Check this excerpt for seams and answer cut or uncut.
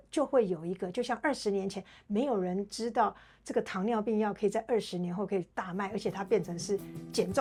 uncut